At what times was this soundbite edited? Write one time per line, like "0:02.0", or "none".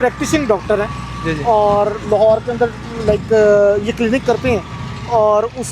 none